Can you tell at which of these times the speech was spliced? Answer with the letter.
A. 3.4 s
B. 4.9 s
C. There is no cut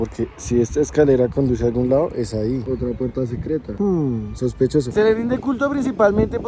B